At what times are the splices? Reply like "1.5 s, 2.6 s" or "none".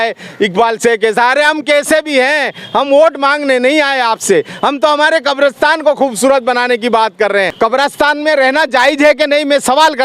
7.5 s